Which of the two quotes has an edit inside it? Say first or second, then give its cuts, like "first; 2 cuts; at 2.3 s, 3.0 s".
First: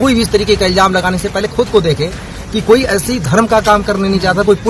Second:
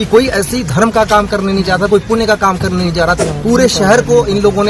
second; 1 cut; at 3.2 s